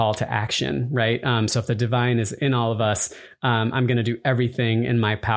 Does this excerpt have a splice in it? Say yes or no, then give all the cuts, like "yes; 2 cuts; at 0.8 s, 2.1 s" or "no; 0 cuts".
no; 0 cuts